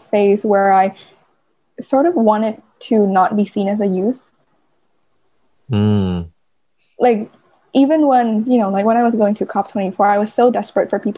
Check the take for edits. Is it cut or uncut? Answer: uncut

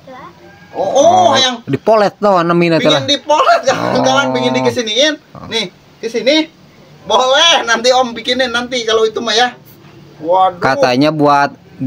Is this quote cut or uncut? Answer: uncut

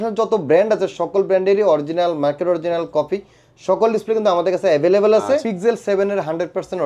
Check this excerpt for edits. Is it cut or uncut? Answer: cut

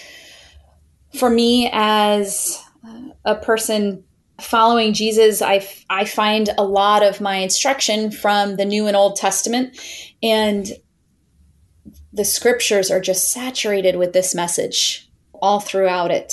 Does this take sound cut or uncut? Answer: cut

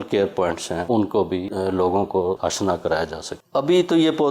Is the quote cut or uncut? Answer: cut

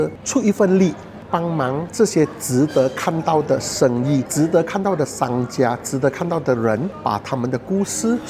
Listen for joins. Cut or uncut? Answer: uncut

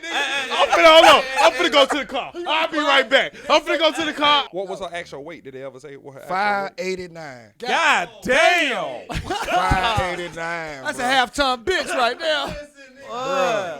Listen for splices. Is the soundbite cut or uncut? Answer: cut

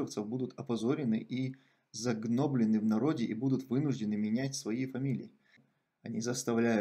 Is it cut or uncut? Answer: cut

